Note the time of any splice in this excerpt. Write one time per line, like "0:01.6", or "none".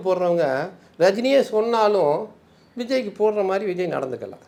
none